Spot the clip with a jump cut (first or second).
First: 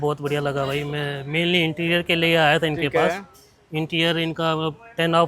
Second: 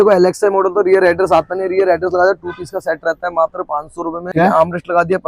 second